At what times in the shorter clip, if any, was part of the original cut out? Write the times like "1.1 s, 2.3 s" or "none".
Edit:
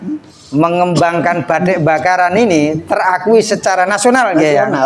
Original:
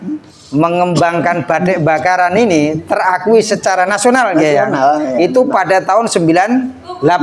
none